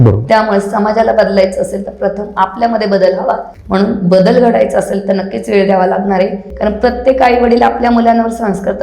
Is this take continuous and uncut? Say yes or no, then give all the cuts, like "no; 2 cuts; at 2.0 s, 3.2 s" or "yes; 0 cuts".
no; 2 cuts; at 3.5 s, 6.5 s